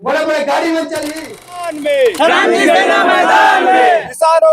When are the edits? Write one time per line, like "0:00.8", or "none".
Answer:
0:01.6

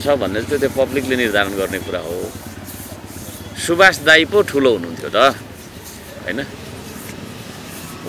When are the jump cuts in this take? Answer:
none

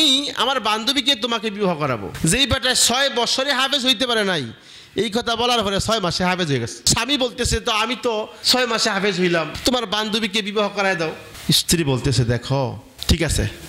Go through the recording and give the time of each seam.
0:06.9
0:08.4
0:09.5

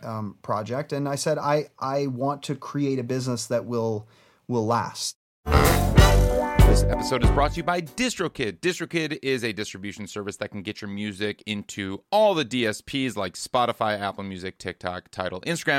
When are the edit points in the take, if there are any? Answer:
0:05.3

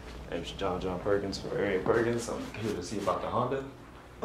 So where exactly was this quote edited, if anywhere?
none

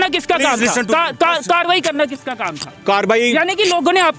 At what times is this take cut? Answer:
none

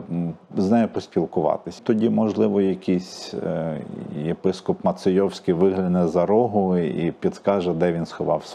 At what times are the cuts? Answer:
0:01.8

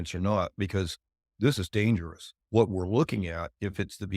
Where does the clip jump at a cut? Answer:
0:02.3

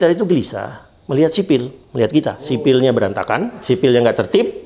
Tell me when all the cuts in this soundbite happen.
0:02.5
0:03.6

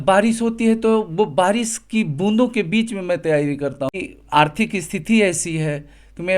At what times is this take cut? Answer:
0:03.9

